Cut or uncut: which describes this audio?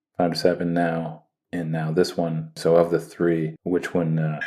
cut